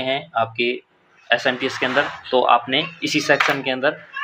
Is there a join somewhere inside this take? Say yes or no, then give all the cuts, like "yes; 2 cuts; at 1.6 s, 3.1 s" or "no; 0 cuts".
no; 0 cuts